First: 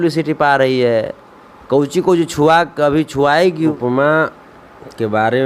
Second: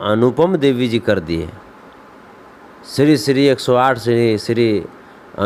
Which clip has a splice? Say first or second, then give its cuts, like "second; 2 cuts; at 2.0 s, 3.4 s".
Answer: first; 1 cut; at 3.7 s